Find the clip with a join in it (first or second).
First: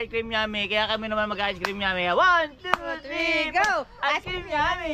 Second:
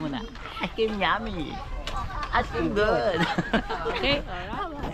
second